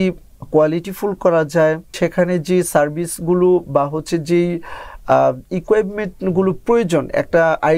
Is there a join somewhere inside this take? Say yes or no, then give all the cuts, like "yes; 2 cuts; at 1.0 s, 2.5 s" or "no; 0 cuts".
yes; 1 cut; at 2.0 s